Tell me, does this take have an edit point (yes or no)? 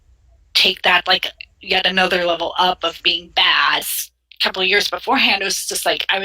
yes